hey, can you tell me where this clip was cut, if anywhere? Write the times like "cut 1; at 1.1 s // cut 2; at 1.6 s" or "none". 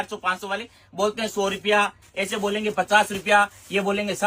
none